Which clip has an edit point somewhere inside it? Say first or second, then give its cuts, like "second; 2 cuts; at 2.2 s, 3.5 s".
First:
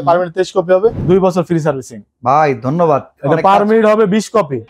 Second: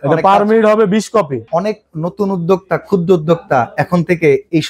first; 1 cut; at 1.0 s